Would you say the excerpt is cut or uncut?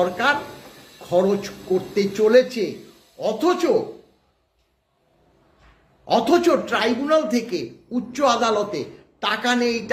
uncut